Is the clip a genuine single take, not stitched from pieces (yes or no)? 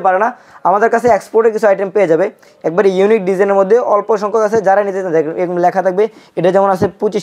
yes